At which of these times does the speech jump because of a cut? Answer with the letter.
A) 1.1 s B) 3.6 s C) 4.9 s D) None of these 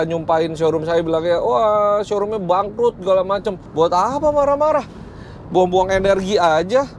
B